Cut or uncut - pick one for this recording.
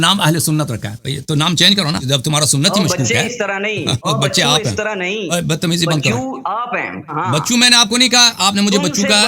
cut